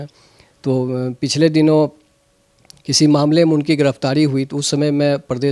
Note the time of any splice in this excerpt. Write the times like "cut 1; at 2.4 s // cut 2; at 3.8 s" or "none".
none